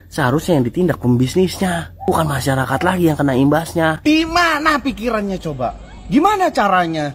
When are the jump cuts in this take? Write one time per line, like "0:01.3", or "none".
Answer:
0:04.0

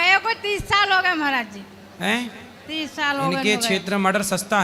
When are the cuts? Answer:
none

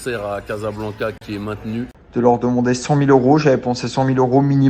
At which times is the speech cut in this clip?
0:01.6

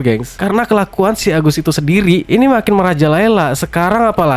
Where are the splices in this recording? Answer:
0:02.2

